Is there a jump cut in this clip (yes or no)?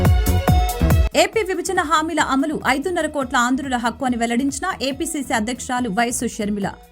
yes